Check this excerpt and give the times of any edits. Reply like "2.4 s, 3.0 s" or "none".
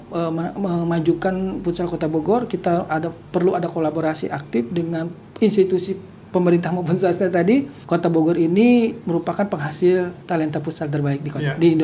7.8 s

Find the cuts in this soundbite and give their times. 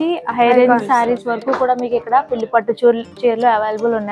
none

